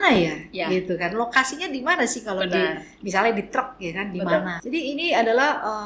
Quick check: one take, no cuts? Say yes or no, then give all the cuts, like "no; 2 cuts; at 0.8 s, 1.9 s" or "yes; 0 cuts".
no; 1 cut; at 4.6 s